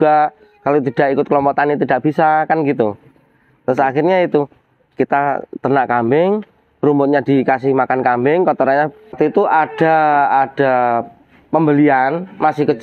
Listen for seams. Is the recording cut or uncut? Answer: cut